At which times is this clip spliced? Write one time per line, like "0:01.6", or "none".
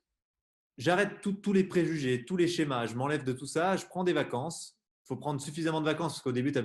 none